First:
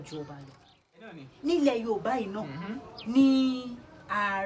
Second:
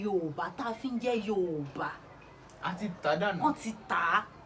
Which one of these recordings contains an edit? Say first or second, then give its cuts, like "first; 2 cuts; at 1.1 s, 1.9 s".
first; 1 cut; at 1.2 s